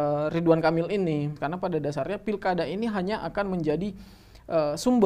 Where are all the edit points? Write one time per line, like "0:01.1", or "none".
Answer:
0:01.3